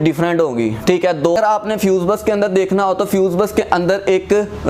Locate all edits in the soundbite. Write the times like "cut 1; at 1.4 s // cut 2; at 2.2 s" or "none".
cut 1; at 1.4 s